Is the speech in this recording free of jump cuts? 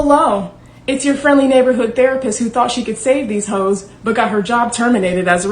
yes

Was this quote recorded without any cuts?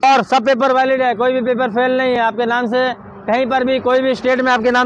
yes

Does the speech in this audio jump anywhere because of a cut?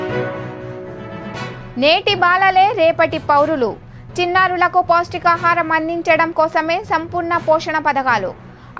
no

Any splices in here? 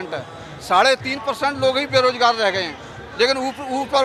no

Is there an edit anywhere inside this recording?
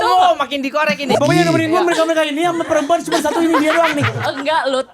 yes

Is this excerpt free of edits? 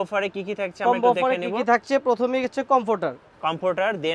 yes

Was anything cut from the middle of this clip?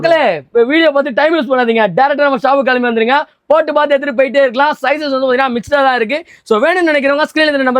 no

